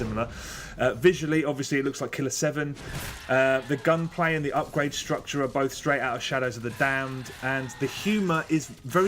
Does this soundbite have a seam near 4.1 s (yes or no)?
yes